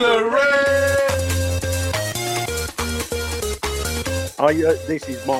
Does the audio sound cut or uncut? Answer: cut